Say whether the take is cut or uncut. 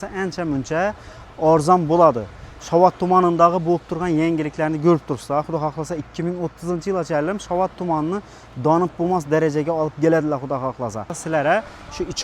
cut